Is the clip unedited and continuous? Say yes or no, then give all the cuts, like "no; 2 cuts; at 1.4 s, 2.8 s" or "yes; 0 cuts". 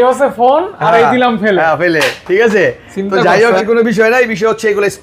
no; 1 cut; at 3.6 s